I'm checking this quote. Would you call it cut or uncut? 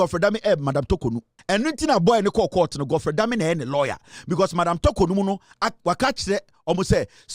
cut